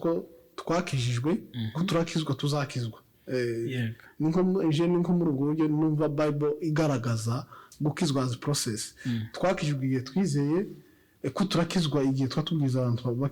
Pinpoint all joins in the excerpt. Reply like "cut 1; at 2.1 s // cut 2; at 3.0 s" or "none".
none